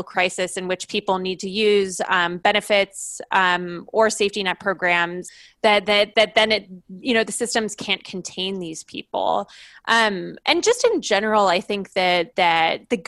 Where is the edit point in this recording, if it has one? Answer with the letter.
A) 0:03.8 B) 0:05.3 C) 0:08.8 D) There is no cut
B